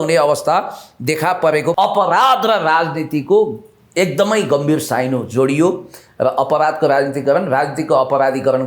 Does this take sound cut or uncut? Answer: cut